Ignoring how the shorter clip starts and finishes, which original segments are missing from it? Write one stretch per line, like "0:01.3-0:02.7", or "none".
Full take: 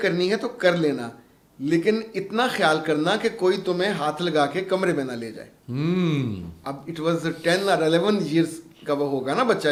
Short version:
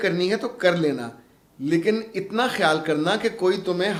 none